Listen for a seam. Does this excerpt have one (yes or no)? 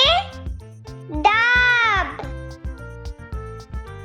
yes